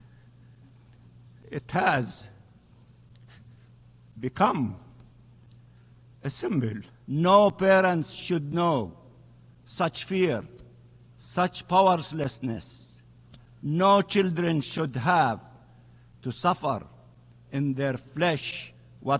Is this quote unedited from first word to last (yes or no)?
no